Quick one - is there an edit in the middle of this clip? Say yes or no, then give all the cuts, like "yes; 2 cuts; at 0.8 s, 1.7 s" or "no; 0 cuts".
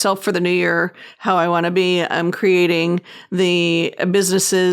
no; 0 cuts